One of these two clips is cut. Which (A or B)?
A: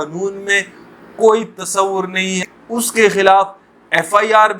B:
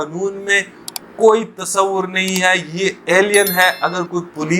A